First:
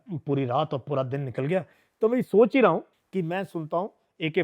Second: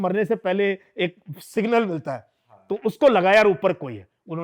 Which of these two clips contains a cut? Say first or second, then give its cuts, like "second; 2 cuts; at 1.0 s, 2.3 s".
first; 1 cut; at 3.0 s